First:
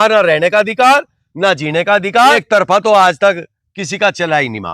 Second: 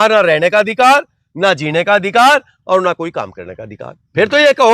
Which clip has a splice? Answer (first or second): first